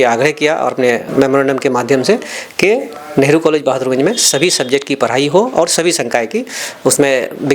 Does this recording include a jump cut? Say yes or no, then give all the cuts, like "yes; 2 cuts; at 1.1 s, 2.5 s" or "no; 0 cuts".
yes; 1 cut; at 1.0 s